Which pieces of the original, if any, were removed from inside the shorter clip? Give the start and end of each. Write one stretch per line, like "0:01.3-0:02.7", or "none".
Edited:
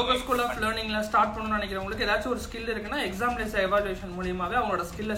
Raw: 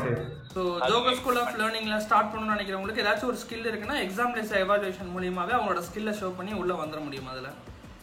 none